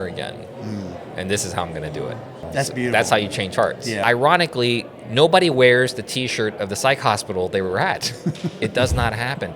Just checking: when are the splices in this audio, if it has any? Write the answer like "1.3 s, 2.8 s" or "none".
2.5 s, 4.0 s